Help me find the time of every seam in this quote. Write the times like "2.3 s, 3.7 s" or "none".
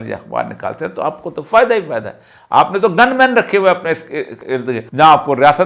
4.8 s